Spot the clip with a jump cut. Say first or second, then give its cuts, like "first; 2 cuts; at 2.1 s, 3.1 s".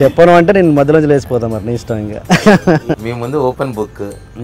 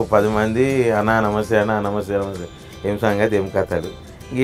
first; 1 cut; at 2.9 s